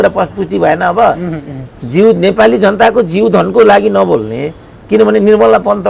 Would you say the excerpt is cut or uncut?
uncut